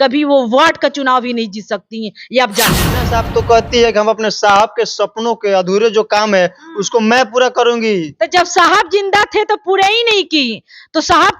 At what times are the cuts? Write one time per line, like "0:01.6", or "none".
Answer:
0:03.0